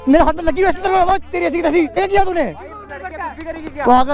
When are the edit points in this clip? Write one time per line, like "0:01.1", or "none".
0:02.0

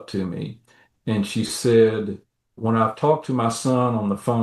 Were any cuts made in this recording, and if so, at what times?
0:02.6

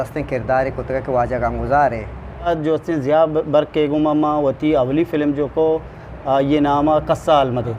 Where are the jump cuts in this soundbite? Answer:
0:02.5

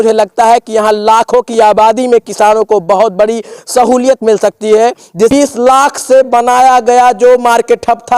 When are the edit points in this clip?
0:05.3

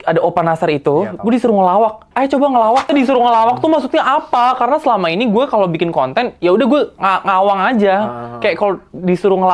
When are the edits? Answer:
0:02.9

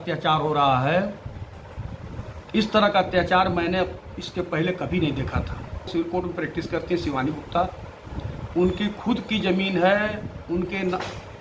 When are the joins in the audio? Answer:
0:05.9

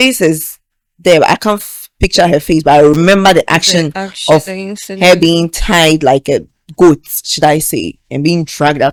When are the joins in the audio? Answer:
none

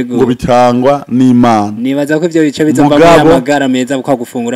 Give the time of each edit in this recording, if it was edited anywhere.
none

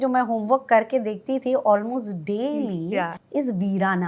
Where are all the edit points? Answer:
0:03.2

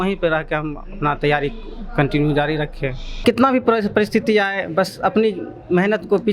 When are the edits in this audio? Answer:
0:03.1

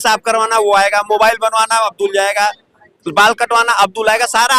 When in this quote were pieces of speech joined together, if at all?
none

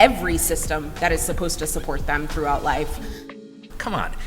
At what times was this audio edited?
0:03.3

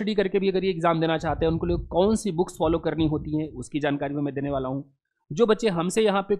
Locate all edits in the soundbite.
none

